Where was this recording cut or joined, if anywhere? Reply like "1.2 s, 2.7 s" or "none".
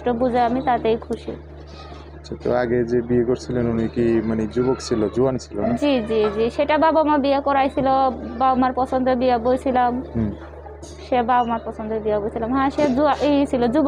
none